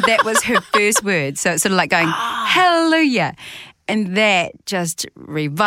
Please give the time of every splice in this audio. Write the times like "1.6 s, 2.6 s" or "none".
none